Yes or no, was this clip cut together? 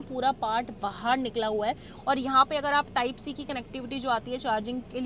no